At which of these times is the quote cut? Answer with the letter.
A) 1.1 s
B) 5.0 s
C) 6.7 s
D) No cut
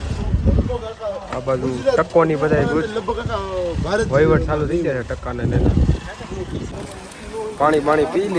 C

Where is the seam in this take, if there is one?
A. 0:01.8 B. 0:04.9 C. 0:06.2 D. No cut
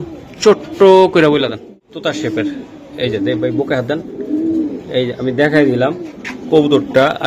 A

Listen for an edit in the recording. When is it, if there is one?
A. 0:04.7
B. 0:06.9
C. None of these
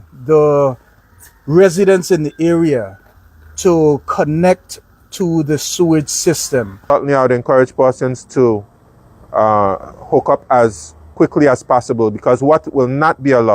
B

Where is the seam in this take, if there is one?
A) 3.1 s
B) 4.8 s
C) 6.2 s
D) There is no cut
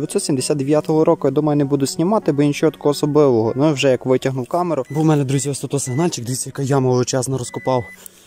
B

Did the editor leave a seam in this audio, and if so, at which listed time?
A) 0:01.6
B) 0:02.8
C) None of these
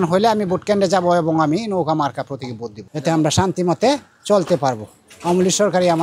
B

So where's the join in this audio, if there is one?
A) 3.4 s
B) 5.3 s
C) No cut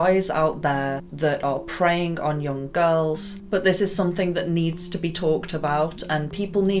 C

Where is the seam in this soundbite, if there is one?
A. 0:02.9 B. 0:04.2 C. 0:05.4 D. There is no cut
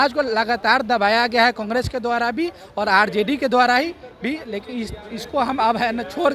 D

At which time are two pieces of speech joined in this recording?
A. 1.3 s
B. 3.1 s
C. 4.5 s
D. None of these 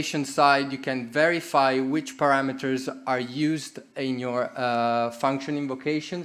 D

